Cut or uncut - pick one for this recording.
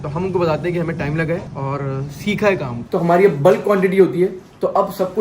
cut